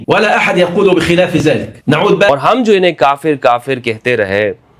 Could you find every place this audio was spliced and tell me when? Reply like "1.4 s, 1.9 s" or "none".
2.3 s